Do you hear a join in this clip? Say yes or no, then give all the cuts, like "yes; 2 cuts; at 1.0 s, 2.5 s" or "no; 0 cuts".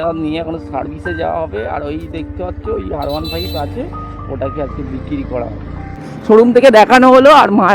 yes; 1 cut; at 6.1 s